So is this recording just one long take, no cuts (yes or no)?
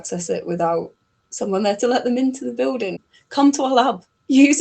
no